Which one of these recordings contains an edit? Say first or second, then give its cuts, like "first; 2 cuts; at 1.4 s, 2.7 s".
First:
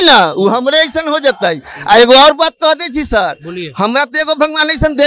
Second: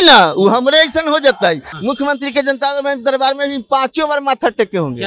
second; 1 cut; at 1.7 s